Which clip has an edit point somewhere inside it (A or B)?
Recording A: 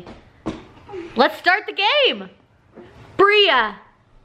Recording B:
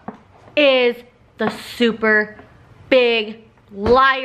A